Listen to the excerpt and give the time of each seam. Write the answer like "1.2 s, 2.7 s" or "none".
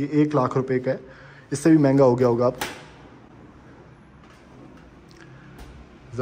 none